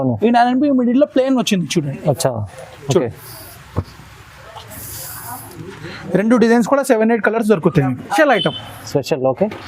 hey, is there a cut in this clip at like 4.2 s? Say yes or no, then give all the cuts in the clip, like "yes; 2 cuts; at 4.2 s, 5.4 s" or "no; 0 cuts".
no; 1 cut; at 8.2 s